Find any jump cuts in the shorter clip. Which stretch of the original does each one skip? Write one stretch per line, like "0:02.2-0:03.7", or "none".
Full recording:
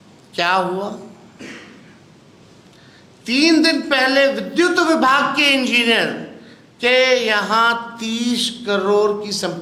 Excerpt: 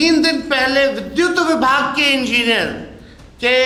none